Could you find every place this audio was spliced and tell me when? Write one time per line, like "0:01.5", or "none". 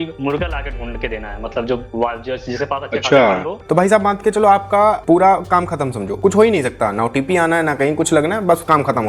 0:03.6